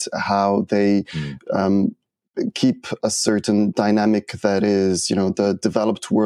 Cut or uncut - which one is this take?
uncut